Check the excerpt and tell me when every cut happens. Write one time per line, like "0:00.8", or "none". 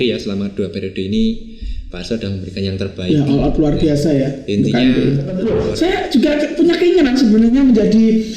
0:05.4